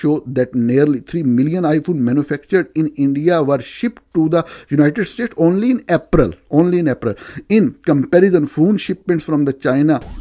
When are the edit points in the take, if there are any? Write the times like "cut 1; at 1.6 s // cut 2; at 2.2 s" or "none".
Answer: none